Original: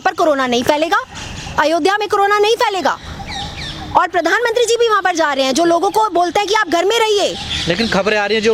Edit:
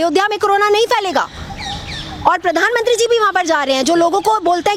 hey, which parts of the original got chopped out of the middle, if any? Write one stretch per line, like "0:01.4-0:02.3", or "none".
none